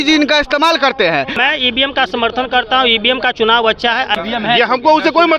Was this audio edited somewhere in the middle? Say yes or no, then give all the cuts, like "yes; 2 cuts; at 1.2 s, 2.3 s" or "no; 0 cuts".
yes; 2 cuts; at 1.3 s, 4.1 s